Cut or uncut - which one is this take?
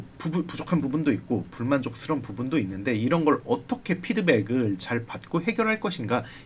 uncut